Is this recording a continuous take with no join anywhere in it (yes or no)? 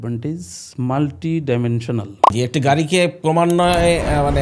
no